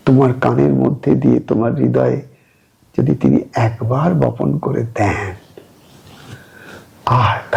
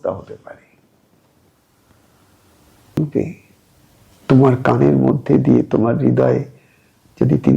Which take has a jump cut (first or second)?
second